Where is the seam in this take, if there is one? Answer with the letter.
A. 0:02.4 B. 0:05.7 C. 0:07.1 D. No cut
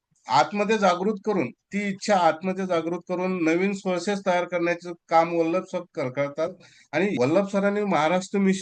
C